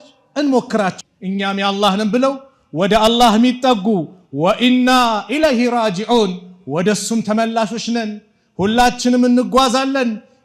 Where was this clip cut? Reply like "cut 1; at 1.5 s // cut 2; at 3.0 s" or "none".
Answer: cut 1; at 1.0 s